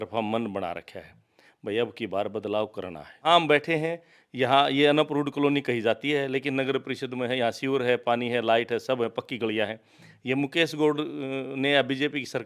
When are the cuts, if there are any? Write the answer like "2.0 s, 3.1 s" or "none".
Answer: 3.2 s

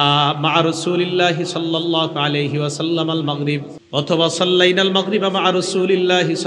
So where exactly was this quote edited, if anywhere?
3.8 s

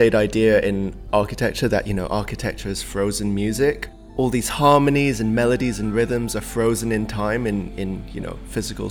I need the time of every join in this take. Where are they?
1.0 s, 3.9 s

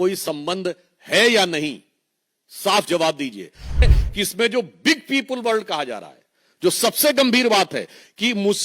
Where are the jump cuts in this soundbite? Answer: 3.9 s

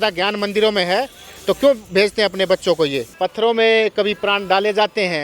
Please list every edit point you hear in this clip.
3.1 s

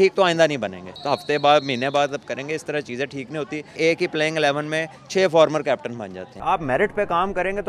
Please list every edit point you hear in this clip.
0.9 s, 3.8 s, 6.2 s

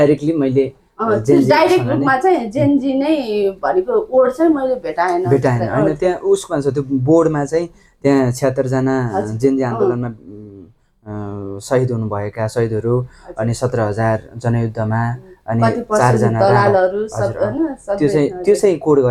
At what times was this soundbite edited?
none

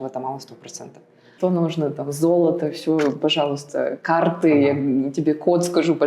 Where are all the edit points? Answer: 1.2 s

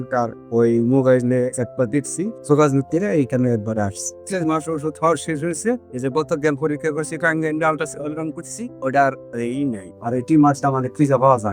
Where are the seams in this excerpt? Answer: 2.4 s, 4.2 s

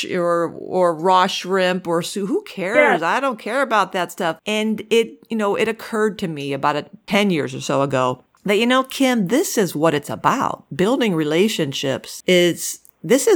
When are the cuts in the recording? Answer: 4.4 s, 6.9 s, 12.1 s

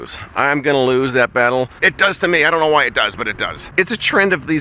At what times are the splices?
1.8 s, 3.6 s

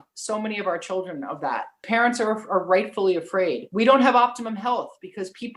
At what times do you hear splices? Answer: 1.8 s, 3.6 s

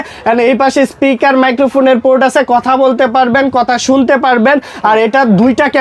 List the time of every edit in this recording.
none

